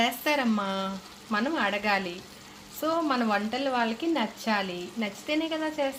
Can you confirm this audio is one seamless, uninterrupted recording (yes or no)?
yes